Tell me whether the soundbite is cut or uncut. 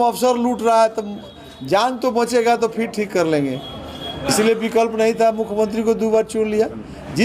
uncut